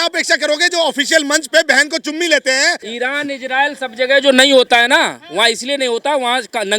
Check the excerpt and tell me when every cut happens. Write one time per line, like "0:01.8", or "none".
0:02.8